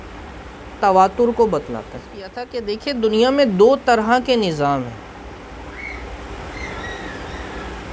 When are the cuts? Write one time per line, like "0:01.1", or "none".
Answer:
0:02.5